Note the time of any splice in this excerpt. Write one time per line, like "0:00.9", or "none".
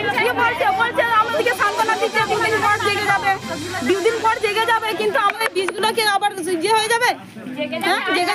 none